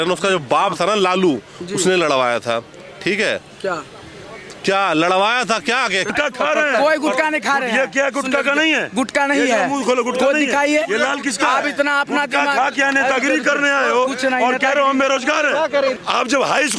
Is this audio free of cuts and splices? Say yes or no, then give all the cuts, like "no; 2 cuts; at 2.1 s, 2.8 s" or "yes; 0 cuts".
no; 2 cuts; at 6.1 s, 15.9 s